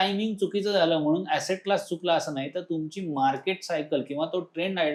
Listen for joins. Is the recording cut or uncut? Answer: uncut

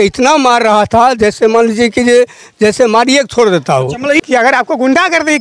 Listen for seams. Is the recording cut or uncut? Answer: cut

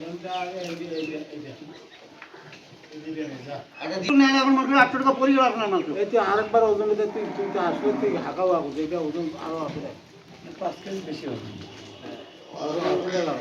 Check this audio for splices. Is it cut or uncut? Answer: uncut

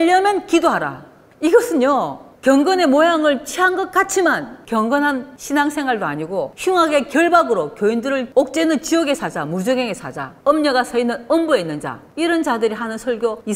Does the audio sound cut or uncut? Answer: uncut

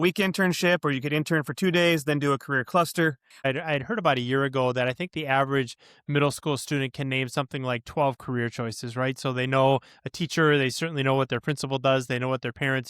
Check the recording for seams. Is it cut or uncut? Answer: cut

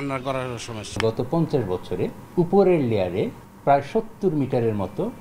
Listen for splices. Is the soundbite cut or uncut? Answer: cut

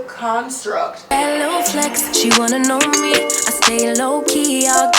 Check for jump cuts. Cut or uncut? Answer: cut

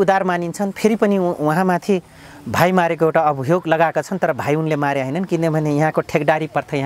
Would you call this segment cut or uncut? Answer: uncut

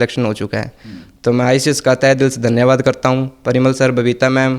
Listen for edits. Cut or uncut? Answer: uncut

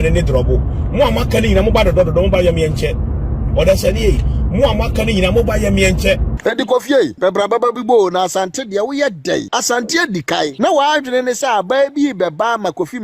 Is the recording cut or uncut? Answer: cut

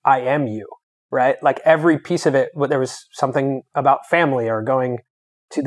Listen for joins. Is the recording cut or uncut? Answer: uncut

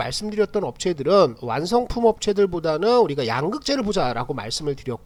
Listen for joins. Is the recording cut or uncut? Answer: uncut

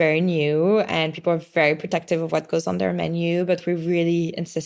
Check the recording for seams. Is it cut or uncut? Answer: uncut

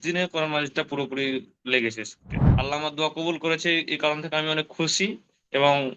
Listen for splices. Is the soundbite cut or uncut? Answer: cut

